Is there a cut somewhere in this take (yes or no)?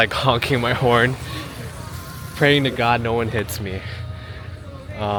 no